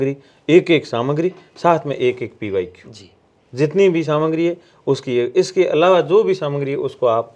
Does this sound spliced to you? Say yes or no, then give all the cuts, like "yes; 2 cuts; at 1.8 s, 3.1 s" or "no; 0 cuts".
no; 0 cuts